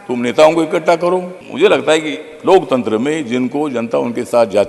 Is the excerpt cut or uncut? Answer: cut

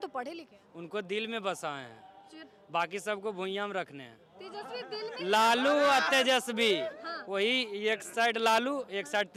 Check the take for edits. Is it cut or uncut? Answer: uncut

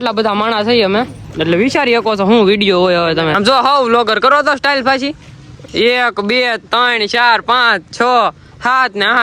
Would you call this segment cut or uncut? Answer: cut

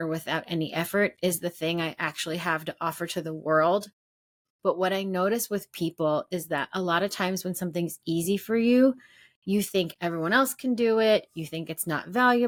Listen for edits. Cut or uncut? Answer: uncut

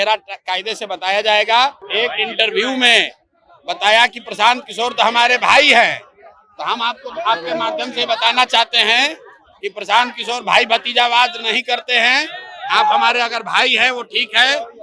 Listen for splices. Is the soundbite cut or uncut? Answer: cut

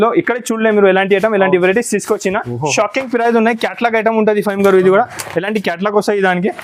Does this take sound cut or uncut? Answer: uncut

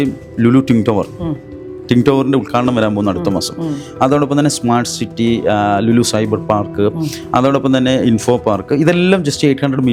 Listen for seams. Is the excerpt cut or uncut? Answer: uncut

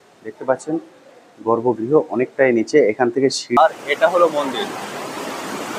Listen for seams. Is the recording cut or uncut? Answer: cut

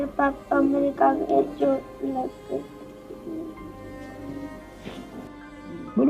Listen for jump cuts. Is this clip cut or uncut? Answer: uncut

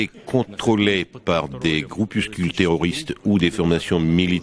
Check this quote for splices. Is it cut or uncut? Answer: uncut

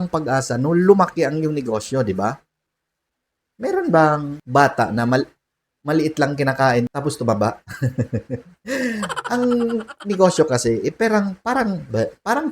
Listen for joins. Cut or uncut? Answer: cut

